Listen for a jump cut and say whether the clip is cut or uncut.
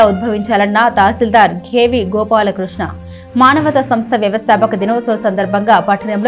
uncut